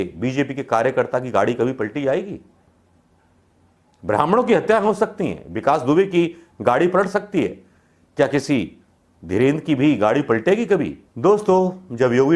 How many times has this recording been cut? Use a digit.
1